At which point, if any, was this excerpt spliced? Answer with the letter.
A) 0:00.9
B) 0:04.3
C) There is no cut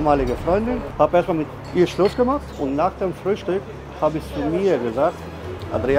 A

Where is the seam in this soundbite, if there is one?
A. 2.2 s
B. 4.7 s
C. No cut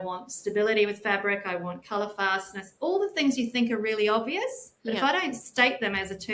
B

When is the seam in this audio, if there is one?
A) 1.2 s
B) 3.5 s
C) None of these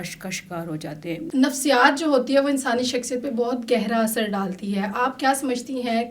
A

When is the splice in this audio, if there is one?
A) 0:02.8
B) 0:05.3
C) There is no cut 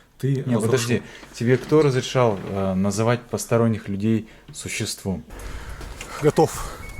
B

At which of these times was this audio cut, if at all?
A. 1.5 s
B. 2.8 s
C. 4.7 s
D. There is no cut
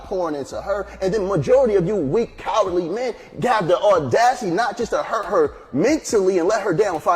C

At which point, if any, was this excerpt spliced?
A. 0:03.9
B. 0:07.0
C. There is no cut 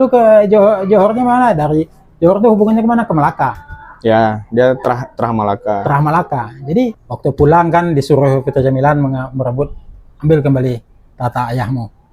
B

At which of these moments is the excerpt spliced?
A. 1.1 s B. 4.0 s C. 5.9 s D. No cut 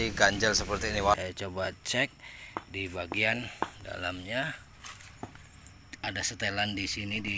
A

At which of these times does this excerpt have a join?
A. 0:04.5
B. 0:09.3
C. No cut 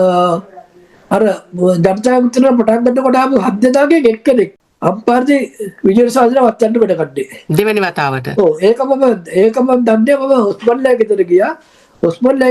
A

